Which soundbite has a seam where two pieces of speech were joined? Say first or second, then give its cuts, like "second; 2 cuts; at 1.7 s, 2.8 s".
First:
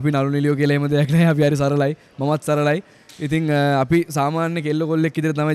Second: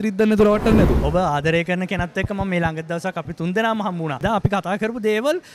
second; 3 cuts; at 1.0 s, 3.3 s, 4.2 s